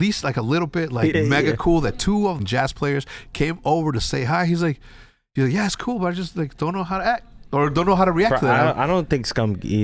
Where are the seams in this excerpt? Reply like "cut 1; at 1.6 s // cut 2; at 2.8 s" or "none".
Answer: cut 1; at 1.2 s // cut 2; at 2.4 s